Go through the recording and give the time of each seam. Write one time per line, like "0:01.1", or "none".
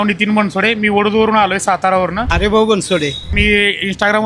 0:02.2
0:03.2